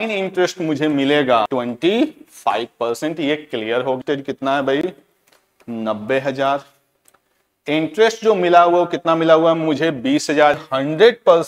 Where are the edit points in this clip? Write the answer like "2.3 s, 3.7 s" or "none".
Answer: 1.5 s, 4.0 s, 10.6 s

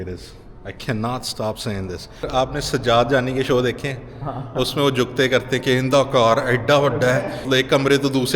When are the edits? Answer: 2.1 s, 7.5 s

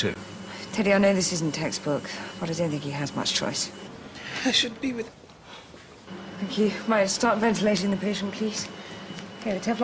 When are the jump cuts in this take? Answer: 5.1 s

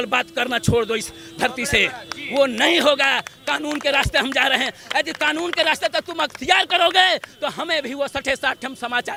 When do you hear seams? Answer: none

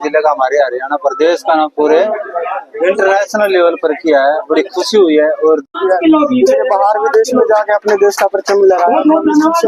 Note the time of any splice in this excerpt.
5.7 s

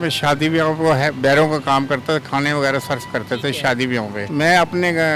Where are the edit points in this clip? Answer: 4.2 s

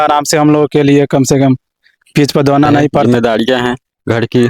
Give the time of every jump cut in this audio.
3.0 s

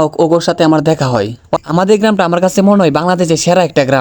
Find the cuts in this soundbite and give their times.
1.5 s

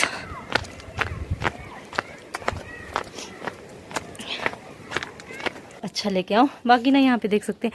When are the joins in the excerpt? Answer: 5.8 s

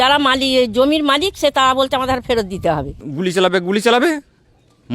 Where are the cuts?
3.0 s

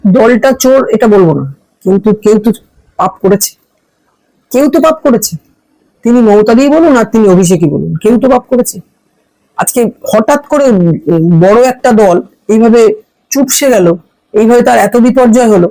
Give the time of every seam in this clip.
none

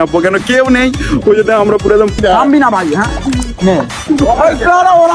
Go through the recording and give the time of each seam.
2.2 s

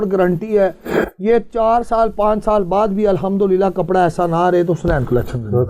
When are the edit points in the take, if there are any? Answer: none

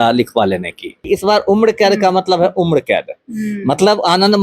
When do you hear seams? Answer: 1.0 s

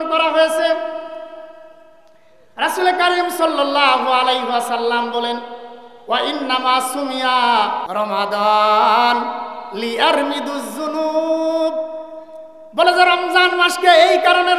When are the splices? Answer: 7.8 s

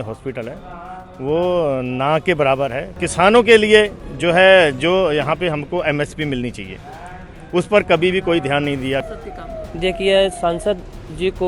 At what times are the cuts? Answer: 2.9 s, 9.0 s

